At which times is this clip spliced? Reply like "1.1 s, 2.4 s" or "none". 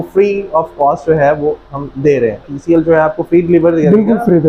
2.4 s